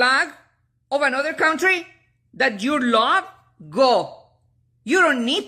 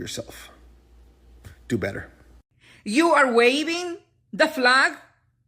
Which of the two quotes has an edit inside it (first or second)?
second